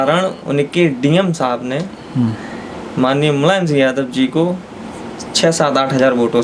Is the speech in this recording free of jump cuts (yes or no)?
yes